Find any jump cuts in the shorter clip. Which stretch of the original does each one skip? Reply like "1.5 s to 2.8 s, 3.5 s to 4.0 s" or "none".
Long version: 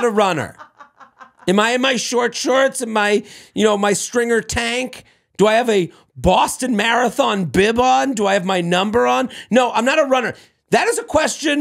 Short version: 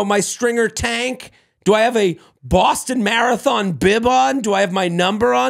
none